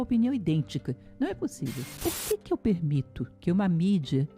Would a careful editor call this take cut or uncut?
cut